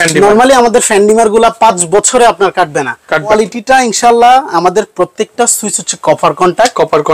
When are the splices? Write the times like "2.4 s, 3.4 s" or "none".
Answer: 3.3 s